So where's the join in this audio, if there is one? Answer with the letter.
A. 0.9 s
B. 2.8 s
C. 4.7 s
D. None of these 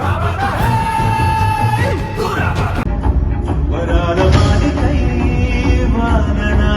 B